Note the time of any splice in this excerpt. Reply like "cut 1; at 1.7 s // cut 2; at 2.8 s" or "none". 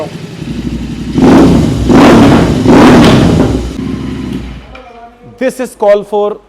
cut 1; at 3.8 s